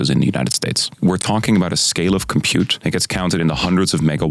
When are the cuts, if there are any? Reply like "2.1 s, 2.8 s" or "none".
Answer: 0.9 s, 2.8 s